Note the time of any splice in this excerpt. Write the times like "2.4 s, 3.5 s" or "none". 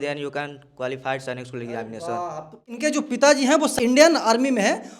2.6 s, 3.7 s